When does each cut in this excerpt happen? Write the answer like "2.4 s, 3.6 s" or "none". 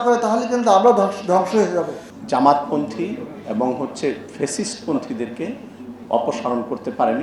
2.0 s

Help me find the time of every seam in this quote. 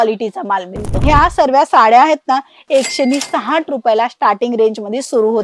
1.0 s

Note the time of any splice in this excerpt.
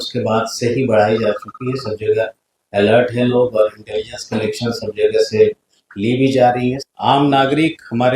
6.8 s

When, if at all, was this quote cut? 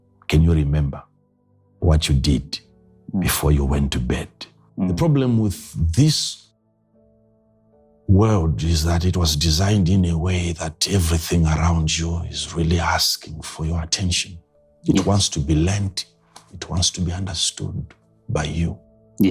5.0 s

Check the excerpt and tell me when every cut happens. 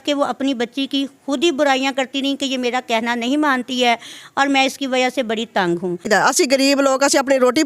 6.1 s

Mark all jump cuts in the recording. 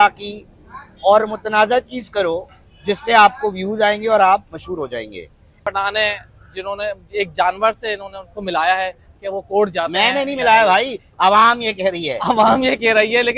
5.6 s

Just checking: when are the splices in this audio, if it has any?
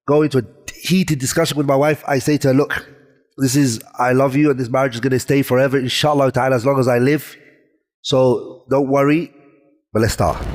none

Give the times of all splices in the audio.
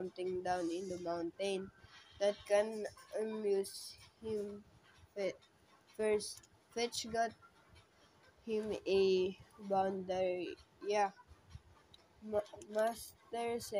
1.8 s, 12.2 s

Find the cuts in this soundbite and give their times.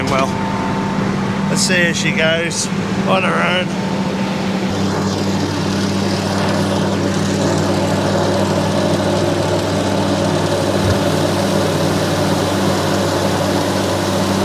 none

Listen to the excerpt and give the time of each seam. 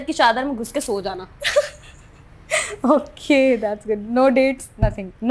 none

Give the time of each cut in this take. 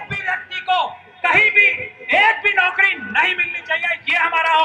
none

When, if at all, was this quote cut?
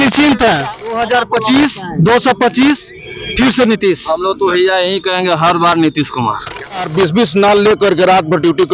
1.0 s, 6.9 s

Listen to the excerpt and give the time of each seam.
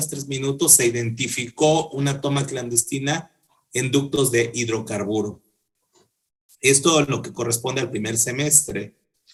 none

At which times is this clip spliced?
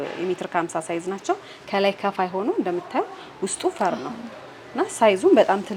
none

